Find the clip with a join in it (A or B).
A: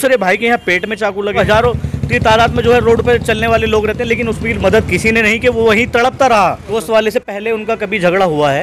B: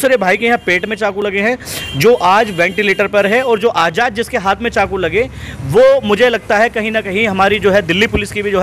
A